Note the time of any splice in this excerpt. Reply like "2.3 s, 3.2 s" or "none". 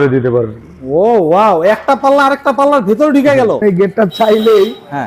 3.8 s